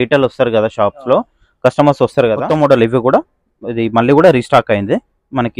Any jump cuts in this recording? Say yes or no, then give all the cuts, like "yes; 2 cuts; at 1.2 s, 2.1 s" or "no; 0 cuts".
yes; 1 cut; at 2.4 s